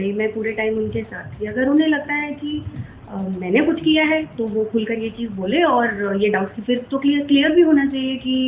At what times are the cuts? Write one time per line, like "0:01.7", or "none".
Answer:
none